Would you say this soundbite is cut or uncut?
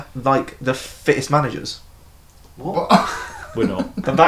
uncut